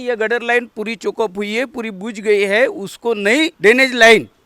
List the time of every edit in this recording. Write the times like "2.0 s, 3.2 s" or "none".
3.5 s